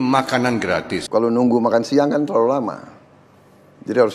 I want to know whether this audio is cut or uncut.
cut